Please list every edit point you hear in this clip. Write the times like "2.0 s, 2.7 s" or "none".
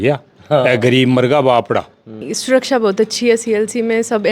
2.3 s